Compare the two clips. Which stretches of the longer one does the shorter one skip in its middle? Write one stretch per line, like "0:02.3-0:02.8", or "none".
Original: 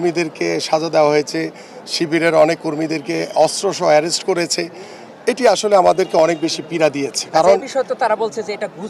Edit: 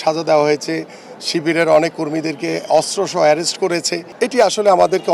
0:04.7-0:05.1